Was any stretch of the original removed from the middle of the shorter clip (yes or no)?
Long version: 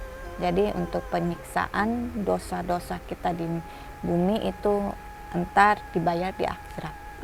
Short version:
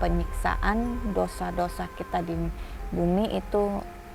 no